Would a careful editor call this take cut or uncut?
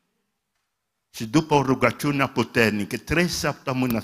uncut